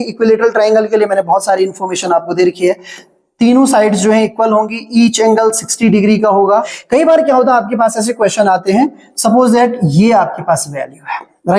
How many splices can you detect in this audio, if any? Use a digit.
1